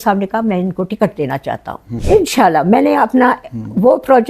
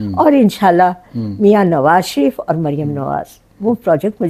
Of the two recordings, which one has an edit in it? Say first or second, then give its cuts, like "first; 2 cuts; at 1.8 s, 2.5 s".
first; 1 cut; at 1.9 s